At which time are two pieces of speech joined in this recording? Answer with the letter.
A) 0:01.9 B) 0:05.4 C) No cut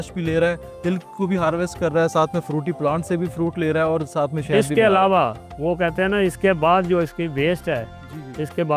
C